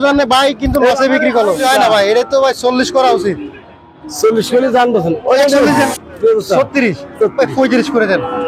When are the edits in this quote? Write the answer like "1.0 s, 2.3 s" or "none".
1.6 s, 5.9 s